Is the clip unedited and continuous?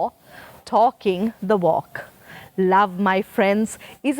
yes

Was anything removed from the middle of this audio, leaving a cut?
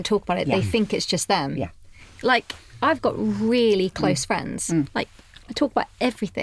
no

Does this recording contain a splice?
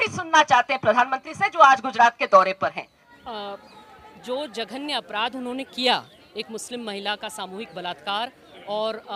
no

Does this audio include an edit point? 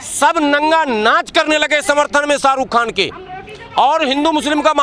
no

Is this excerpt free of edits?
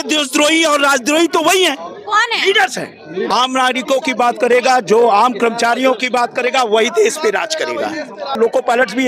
no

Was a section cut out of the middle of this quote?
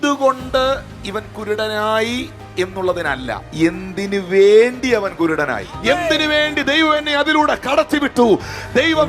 yes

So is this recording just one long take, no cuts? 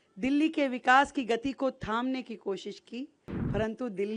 no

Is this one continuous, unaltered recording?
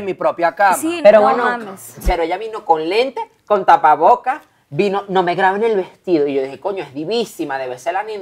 no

